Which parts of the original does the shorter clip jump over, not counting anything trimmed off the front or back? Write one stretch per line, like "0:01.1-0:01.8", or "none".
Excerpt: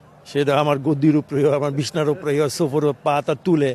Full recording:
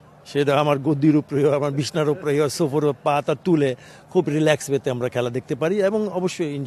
none